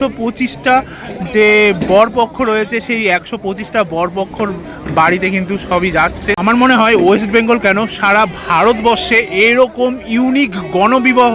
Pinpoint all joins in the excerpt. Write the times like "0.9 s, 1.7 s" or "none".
6.4 s